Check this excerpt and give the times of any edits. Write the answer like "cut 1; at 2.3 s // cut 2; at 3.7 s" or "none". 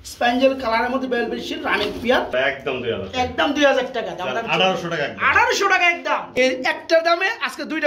cut 1; at 2.3 s // cut 2; at 6.3 s